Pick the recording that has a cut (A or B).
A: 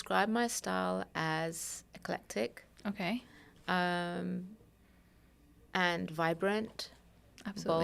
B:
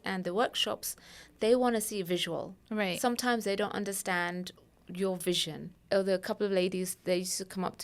B